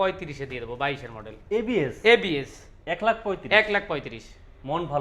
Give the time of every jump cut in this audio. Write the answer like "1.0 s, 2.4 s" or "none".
none